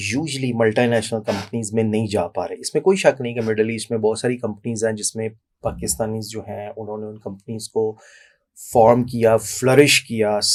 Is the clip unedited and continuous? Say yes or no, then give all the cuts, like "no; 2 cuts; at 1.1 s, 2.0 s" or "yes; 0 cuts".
yes; 0 cuts